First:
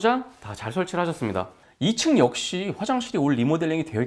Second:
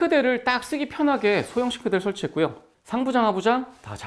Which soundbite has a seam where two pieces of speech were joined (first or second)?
first